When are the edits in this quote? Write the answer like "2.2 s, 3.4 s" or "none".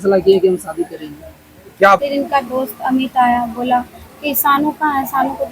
2.0 s